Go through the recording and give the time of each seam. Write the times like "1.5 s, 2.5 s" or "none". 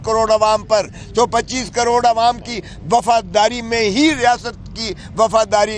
none